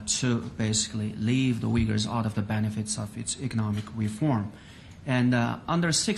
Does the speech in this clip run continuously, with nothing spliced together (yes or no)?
no